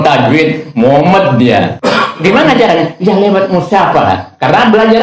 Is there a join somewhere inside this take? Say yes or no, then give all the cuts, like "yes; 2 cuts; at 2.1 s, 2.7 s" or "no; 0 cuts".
yes; 1 cut; at 1.7 s